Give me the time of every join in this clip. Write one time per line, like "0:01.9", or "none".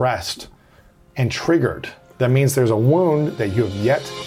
0:03.4